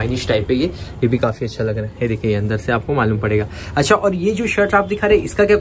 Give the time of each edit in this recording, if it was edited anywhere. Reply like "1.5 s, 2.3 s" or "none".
none